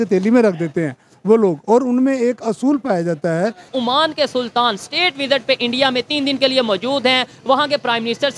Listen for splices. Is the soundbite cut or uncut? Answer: cut